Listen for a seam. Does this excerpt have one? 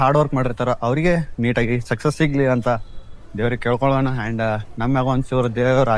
no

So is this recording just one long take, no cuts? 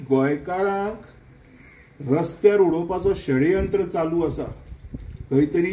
yes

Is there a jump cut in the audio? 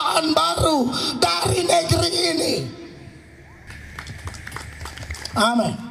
yes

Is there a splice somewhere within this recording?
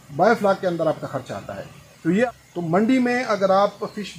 yes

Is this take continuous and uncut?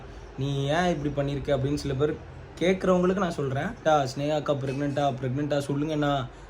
no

